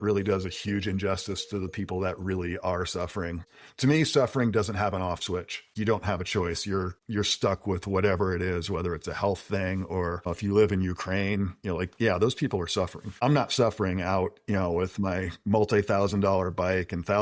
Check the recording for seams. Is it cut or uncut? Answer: cut